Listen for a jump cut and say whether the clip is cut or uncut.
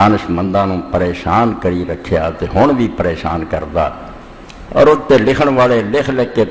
uncut